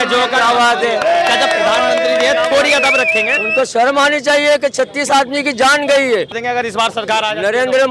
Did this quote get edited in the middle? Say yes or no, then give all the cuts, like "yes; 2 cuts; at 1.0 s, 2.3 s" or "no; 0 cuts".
yes; 1 cut; at 6.4 s